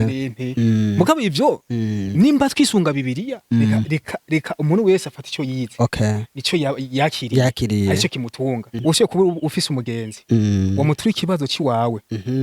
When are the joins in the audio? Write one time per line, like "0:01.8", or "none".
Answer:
0:08.7